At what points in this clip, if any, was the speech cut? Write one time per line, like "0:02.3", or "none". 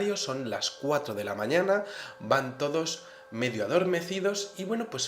0:01.4